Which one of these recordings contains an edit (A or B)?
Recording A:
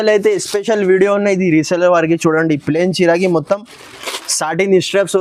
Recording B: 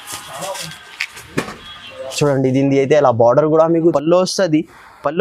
B